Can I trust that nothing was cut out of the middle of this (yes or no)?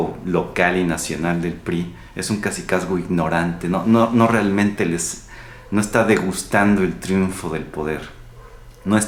yes